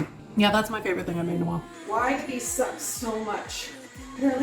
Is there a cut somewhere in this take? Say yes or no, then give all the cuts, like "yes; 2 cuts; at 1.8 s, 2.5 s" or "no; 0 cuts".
yes; 1 cut; at 1.7 s